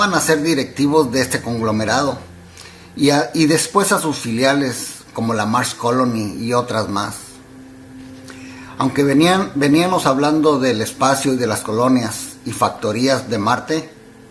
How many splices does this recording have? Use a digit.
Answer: 1